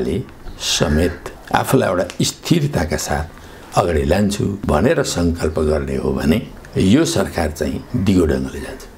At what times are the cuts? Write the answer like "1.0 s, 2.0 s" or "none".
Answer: 4.6 s, 7.8 s